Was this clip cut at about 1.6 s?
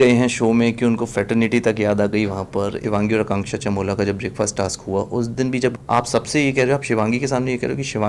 no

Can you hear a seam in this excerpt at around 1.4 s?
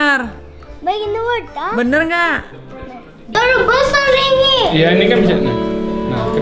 no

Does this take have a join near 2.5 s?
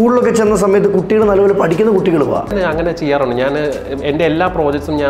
yes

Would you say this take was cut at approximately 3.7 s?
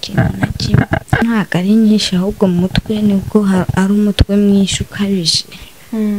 no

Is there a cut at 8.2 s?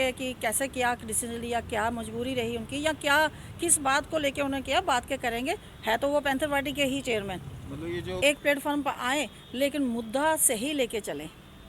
yes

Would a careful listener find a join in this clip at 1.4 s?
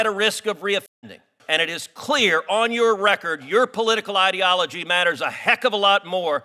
yes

